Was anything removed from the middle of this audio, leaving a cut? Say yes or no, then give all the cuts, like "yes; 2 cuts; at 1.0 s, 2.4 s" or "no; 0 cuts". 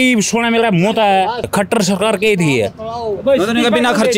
yes; 1 cut; at 1.5 s